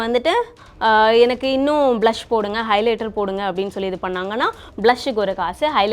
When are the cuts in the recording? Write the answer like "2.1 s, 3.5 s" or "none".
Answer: none